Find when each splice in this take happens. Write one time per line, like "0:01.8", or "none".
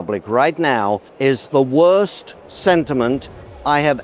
0:01.2